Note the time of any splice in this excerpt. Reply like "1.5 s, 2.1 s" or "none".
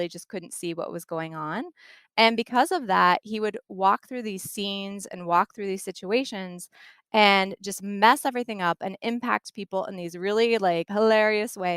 10.9 s